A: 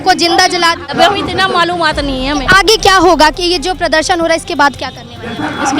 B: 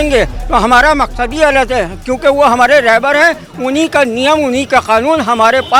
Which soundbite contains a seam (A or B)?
A